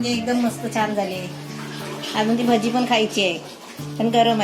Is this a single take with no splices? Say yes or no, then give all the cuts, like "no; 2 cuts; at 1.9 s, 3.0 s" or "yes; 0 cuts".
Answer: yes; 0 cuts